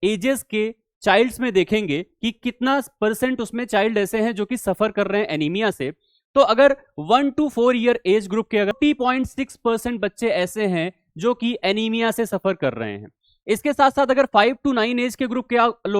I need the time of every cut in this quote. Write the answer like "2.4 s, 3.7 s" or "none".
8.7 s